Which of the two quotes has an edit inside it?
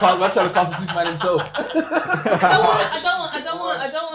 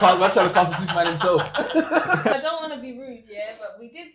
second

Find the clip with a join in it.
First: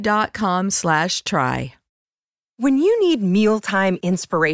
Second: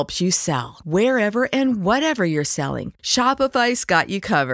first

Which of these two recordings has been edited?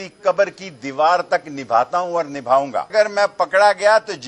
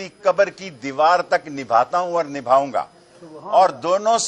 first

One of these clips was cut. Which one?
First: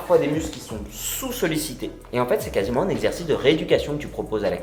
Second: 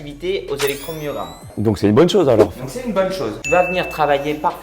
second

